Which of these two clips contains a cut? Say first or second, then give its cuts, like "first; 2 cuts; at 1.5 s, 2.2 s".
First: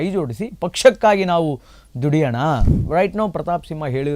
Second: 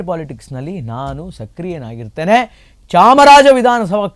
first; 1 cut; at 2.8 s